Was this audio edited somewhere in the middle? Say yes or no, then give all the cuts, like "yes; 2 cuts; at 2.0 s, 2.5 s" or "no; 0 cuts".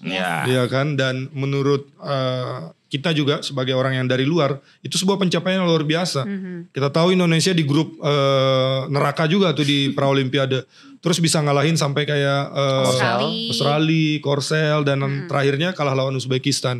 no; 0 cuts